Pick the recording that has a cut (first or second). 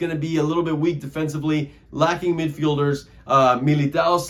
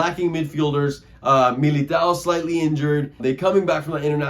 second